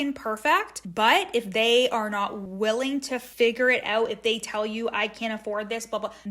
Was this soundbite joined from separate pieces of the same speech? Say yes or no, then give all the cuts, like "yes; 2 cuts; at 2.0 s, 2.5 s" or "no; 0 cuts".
yes; 2 cuts; at 2.4 s, 3.3 s